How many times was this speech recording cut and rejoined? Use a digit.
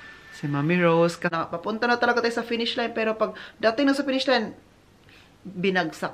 1